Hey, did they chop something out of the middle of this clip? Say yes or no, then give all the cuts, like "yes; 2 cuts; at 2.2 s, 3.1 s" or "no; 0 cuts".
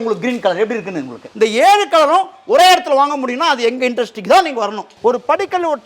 yes; 2 cuts; at 1.3 s, 4.8 s